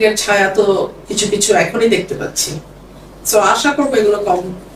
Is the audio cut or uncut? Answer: uncut